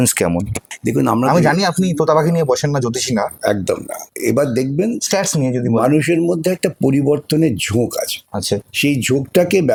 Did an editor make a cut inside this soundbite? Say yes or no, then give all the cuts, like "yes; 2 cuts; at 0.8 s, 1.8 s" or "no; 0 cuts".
no; 0 cuts